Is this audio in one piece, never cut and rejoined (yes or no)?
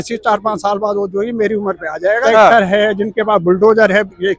no